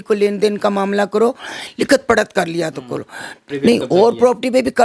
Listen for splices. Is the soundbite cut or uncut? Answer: cut